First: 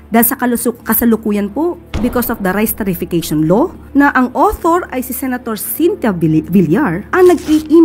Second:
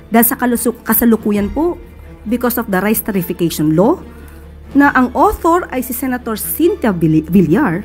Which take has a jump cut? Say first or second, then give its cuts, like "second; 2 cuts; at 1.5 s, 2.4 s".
first; 3 cuts; at 1.9 s, 3.8 s, 7.0 s